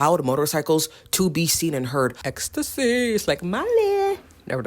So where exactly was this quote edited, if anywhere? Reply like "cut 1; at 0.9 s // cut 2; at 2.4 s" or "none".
cut 1; at 2.3 s